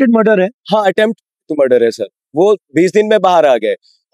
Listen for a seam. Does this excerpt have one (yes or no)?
no